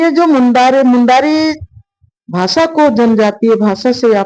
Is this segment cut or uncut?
uncut